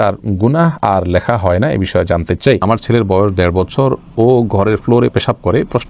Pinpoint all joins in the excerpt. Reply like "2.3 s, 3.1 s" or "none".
2.6 s